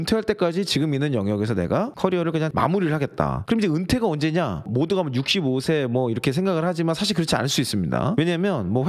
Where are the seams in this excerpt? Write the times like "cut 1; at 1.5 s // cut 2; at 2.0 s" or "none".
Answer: none